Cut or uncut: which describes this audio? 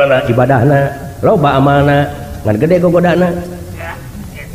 uncut